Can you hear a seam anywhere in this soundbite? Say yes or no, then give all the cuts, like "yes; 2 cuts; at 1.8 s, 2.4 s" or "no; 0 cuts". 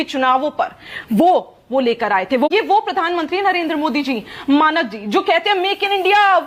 yes; 1 cut; at 2.5 s